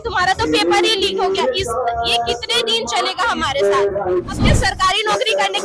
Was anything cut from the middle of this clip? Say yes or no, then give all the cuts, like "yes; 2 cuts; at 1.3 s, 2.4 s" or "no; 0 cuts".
yes; 1 cut; at 4.4 s